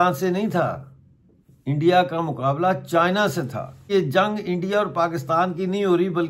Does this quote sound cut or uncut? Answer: cut